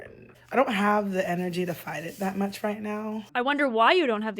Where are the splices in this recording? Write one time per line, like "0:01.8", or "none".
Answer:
0:03.3